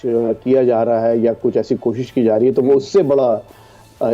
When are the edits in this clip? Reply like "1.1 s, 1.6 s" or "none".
none